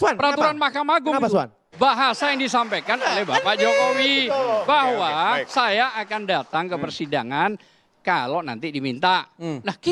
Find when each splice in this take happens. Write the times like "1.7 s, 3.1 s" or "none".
none